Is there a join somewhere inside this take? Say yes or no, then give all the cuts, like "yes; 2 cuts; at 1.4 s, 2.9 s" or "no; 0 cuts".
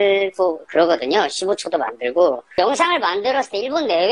yes; 1 cut; at 2.5 s